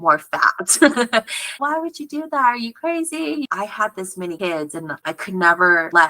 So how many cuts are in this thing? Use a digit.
2